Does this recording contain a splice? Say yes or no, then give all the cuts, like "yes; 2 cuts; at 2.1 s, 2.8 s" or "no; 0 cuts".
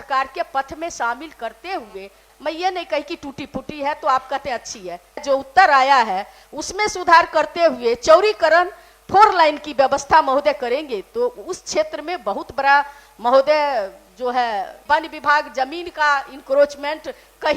yes; 3 cuts; at 2.3 s, 5.2 s, 14.8 s